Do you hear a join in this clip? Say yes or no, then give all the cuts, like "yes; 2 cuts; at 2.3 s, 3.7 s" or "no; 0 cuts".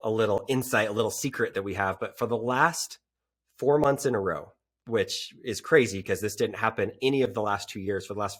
no; 0 cuts